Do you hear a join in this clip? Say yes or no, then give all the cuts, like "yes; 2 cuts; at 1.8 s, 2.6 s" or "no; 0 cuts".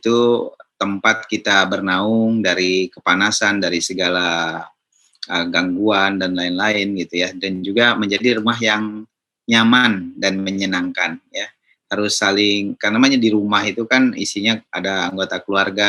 no; 0 cuts